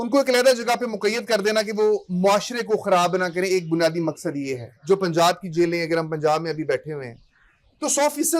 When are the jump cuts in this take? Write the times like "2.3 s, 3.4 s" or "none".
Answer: 4.8 s